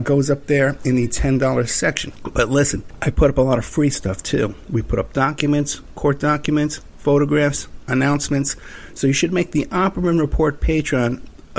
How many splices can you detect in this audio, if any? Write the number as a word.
two